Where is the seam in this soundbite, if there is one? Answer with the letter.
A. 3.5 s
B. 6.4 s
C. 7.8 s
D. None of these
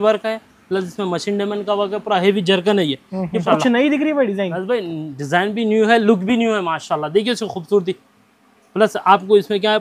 A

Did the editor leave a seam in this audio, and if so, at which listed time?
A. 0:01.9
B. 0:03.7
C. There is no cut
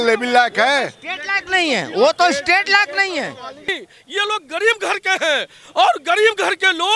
B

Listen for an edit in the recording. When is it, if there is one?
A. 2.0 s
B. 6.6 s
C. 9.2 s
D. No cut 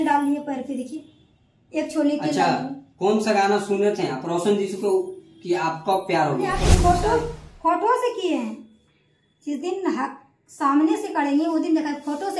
B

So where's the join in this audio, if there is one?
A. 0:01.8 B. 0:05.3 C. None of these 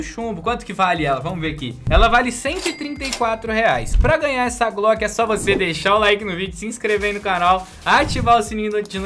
A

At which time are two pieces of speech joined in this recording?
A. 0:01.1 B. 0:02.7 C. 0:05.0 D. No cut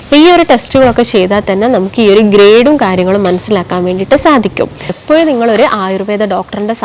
C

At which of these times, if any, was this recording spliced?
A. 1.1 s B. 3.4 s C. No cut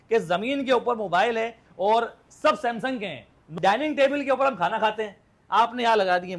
B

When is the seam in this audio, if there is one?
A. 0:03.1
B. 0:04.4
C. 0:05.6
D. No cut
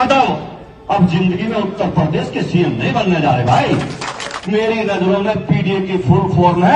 B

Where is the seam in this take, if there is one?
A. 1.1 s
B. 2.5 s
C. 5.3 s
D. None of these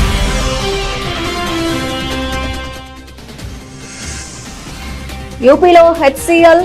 C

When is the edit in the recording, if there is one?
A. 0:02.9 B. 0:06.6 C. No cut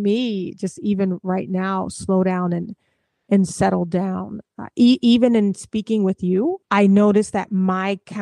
B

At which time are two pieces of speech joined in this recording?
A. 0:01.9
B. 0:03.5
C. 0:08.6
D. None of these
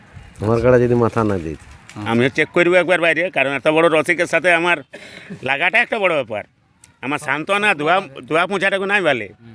A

